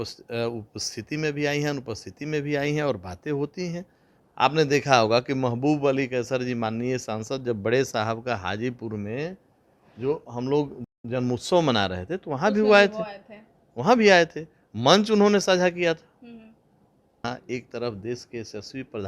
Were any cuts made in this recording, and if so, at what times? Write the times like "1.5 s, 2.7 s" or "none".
4.2 s, 17.1 s